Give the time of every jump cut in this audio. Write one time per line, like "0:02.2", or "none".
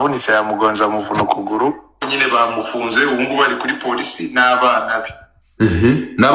0:02.0